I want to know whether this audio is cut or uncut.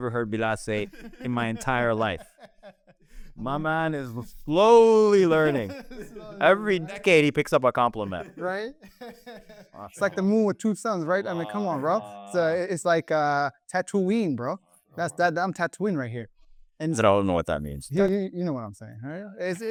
uncut